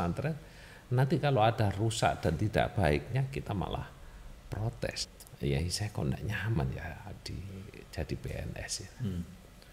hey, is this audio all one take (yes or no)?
no